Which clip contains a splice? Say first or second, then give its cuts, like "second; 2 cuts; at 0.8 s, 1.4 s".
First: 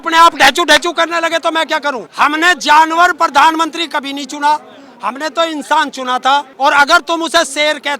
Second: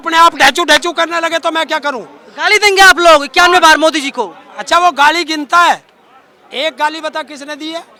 first; 2 cuts; at 2.1 s, 6.5 s